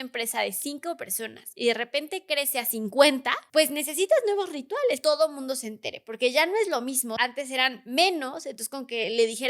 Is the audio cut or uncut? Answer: cut